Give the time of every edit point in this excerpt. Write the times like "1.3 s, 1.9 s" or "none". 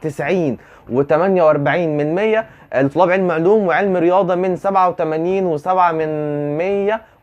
none